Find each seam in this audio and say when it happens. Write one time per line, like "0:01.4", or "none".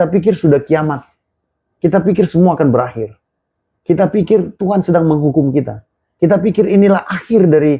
none

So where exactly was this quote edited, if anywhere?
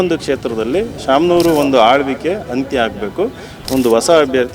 none

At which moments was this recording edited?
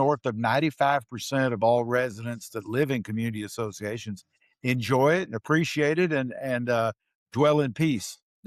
none

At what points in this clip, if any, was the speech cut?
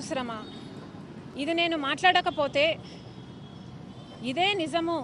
0:01.3

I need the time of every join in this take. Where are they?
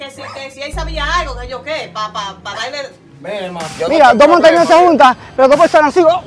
0:03.8

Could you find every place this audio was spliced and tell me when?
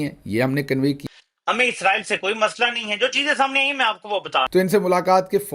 0:01.0
0:04.5

